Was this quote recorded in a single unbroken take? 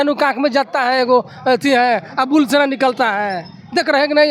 yes; 0 cuts

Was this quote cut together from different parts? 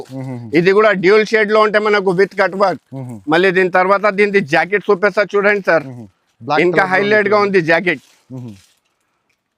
no; 0 cuts

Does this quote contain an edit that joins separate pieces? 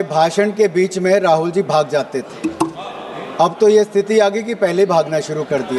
no; 0 cuts

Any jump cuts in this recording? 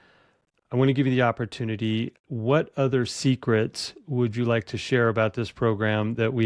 no; 0 cuts

